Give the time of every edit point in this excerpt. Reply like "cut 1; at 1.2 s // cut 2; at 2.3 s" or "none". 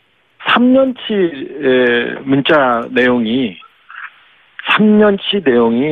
cut 1; at 1.8 s